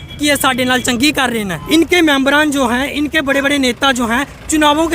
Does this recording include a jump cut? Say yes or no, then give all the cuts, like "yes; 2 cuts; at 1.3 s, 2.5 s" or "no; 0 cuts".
yes; 1 cut; at 1.6 s